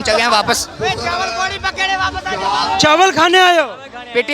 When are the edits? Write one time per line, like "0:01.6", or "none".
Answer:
none